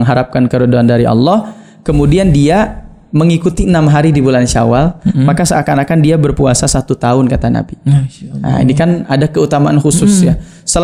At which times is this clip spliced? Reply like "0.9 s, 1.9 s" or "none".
none